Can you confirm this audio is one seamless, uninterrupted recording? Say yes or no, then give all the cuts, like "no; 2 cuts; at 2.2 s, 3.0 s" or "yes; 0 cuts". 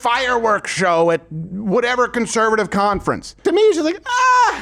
no; 1 cut; at 3.4 s